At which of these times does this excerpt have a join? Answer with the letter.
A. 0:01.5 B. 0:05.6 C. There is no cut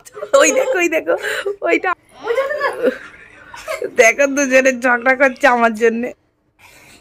C